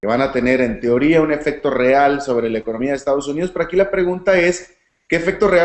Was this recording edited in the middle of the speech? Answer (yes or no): no